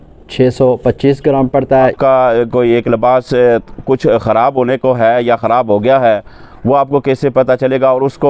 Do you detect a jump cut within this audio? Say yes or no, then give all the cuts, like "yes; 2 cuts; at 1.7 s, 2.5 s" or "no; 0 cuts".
yes; 1 cut; at 1.9 s